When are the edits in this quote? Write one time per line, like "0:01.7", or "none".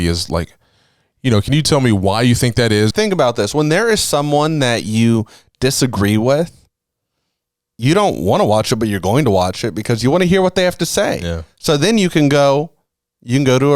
0:02.9